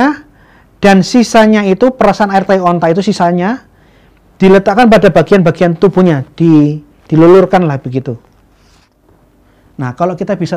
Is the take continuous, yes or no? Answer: no